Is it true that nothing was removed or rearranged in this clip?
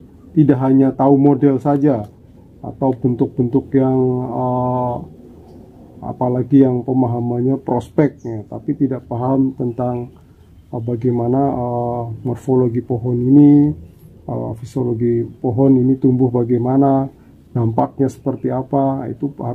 yes; 0 cuts

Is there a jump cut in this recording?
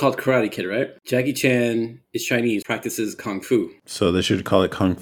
yes; 3 cuts; at 1.0 s, 2.6 s, 3.8 s

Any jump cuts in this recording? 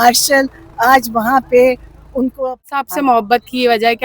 yes; 1 cut; at 2.6 s

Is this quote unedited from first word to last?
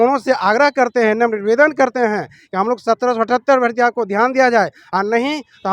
yes; 0 cuts

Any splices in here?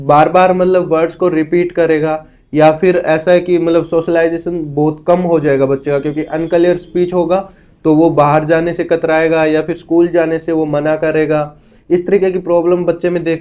no; 0 cuts

